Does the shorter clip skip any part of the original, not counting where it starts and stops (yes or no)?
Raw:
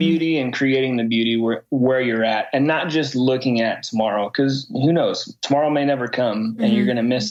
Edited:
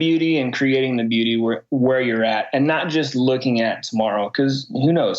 no